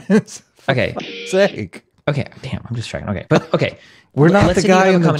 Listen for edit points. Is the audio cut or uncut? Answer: uncut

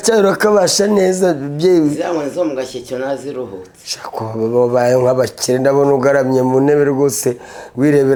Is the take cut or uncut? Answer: uncut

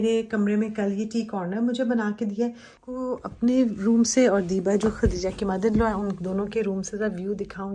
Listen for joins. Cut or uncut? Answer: cut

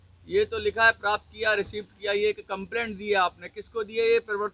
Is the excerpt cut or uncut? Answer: uncut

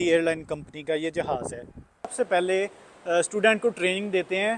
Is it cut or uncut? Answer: cut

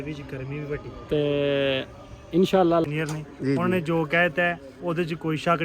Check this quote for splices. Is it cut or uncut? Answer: cut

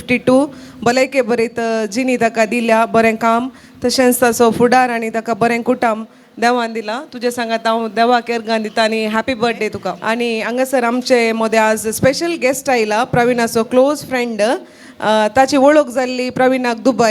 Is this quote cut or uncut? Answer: cut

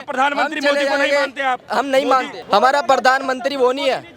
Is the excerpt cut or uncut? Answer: cut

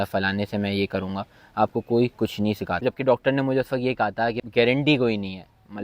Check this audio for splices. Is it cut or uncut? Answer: cut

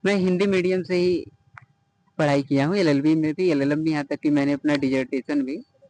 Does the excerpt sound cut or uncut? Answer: uncut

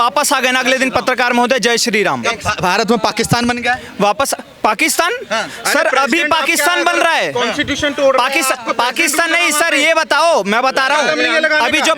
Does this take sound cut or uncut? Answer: uncut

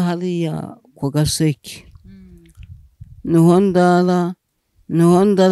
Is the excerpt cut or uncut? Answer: uncut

